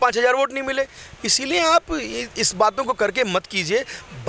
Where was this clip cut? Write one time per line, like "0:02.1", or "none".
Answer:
none